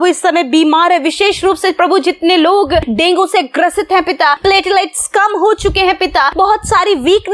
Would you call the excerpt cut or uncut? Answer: cut